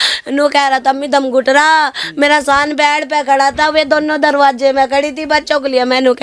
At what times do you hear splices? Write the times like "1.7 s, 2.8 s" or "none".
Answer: none

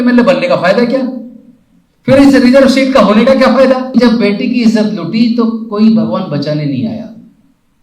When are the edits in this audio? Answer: 4.0 s

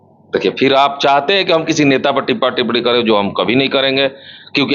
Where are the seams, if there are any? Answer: none

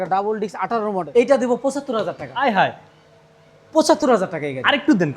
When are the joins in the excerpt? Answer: 1.1 s

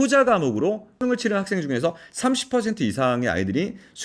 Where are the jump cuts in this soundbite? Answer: 1.0 s

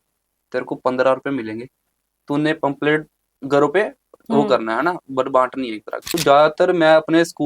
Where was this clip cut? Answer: 6.0 s

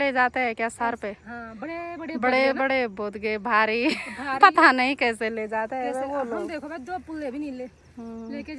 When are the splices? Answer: none

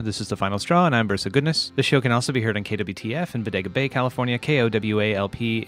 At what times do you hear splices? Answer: 1.6 s

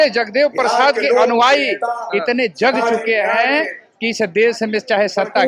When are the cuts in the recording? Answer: none

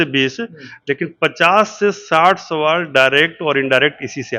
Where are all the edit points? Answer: none

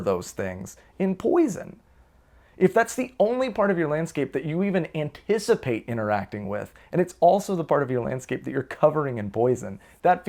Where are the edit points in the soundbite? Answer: none

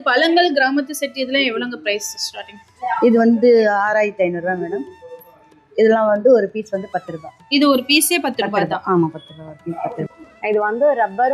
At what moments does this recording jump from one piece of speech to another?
10.2 s

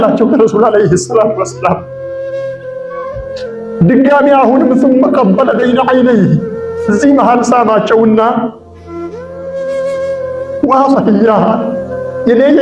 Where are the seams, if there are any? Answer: none

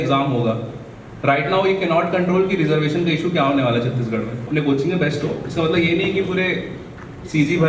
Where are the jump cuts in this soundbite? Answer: 4.4 s

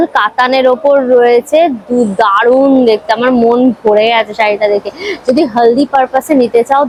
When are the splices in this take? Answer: none

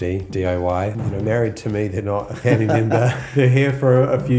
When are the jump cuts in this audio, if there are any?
1.0 s

